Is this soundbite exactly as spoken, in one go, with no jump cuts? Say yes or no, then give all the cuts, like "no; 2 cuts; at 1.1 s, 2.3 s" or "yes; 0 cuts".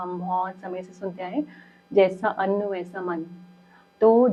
yes; 0 cuts